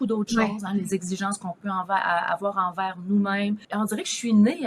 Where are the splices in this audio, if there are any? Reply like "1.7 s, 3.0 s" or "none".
3.6 s